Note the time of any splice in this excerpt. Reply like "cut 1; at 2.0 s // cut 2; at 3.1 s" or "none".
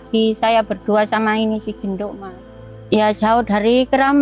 cut 1; at 2.6 s